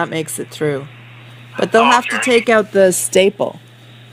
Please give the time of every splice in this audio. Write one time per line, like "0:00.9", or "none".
0:02.6